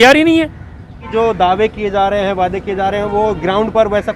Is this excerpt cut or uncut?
cut